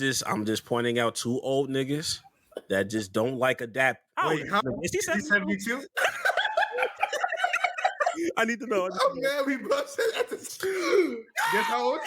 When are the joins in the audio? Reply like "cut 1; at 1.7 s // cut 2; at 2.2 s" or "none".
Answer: cut 1; at 4.1 s // cut 2; at 8.1 s // cut 3; at 10.4 s